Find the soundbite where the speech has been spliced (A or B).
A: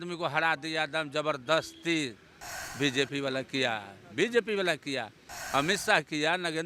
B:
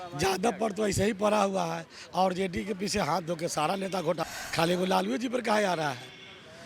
B